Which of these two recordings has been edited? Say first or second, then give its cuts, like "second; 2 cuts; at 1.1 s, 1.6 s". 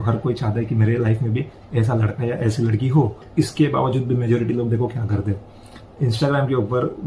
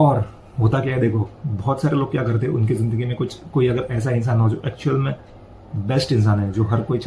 first; 1 cut; at 3.3 s